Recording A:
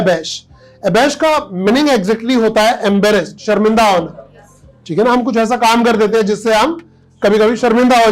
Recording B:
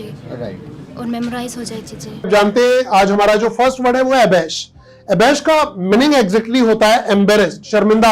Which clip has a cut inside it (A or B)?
B